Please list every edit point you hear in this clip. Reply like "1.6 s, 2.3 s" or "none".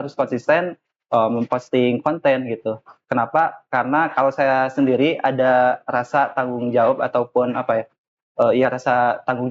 none

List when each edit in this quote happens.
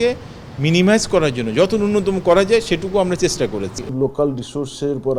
3.9 s

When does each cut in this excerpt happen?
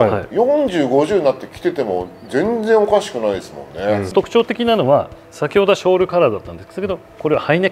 4.0 s

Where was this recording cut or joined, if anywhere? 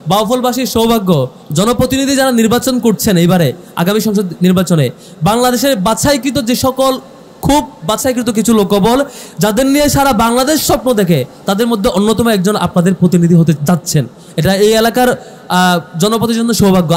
1.4 s, 13.6 s

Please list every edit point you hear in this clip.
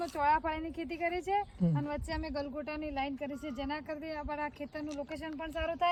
none

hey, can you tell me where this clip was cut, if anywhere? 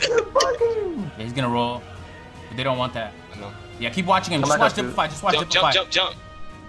1.1 s

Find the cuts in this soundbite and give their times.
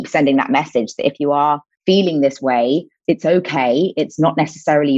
3.0 s

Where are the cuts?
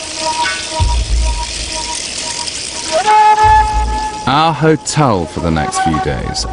none

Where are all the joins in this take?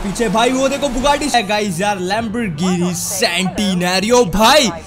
1.3 s

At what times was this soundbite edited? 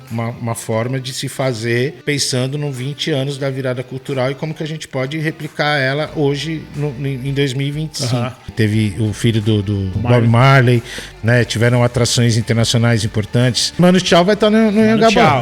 2.0 s, 8.5 s, 10.0 s, 13.8 s

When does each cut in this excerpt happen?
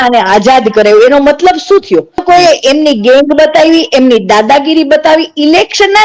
2.2 s

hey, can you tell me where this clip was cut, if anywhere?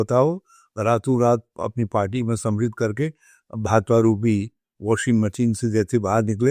none

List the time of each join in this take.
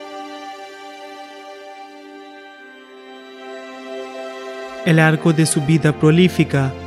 4.9 s

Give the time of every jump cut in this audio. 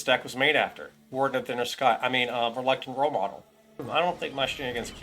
3.7 s

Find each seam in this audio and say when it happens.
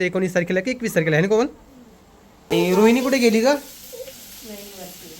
2.5 s

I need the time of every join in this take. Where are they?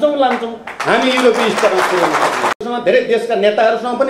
2.6 s

